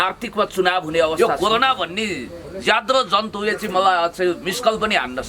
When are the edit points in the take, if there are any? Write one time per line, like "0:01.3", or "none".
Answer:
0:01.2

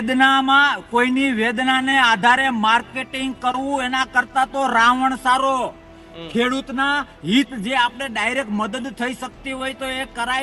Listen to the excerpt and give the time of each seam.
none

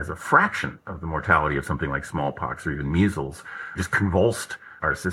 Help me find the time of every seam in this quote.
0:03.8

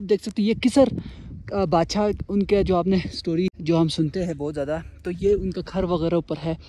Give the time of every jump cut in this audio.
0:03.6

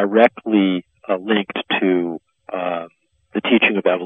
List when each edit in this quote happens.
none

